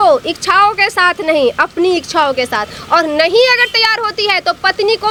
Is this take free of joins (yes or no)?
yes